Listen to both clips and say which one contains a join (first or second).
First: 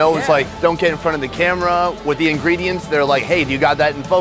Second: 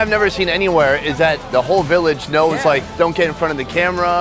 second